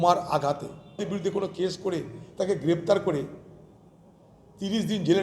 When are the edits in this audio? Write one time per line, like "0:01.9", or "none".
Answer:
0:01.1